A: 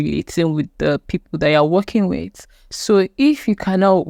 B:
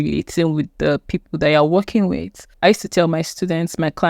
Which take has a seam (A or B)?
B